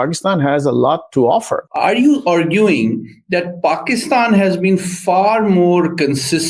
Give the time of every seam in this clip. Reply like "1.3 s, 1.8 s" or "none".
1.6 s